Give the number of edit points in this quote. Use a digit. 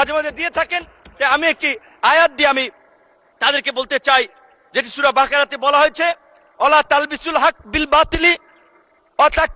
0